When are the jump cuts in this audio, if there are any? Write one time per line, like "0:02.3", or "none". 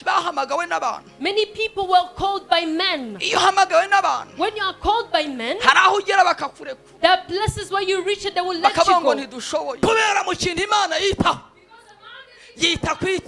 0:09.8